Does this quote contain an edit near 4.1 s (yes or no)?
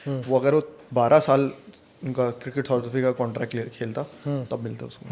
no